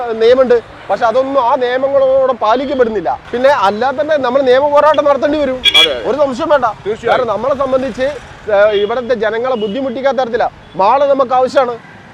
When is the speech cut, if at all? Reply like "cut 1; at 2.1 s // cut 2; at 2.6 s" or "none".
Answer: cut 1; at 3.2 s